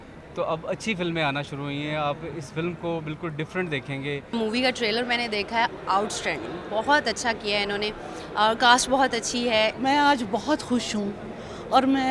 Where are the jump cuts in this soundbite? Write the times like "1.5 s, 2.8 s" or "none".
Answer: 4.3 s, 9.8 s